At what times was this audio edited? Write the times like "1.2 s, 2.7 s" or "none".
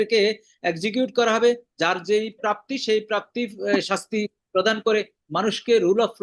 none